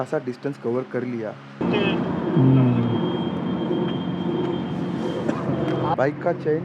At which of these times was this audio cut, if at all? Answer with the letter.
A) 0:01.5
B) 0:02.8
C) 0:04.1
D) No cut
A